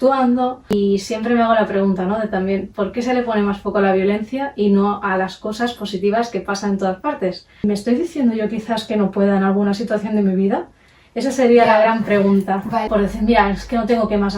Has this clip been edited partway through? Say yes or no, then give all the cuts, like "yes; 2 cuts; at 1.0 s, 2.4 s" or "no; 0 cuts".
yes; 3 cuts; at 0.7 s, 7.5 s, 12.9 s